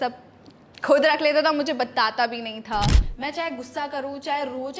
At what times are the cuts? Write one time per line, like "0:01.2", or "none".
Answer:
0:03.0